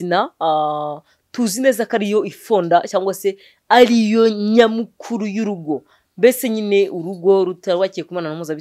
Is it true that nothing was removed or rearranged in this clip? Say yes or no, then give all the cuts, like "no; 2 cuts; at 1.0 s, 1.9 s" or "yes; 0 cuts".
yes; 0 cuts